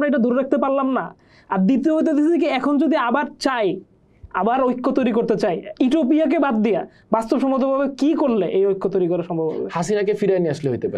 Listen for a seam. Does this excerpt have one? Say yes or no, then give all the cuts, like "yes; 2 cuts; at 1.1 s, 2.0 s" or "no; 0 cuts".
no; 0 cuts